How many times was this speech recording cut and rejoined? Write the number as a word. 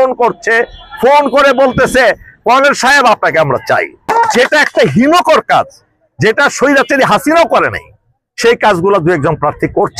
one